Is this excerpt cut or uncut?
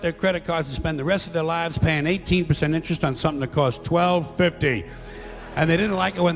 uncut